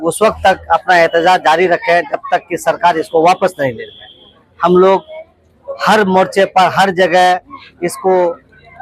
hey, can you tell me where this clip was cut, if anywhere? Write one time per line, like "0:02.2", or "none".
none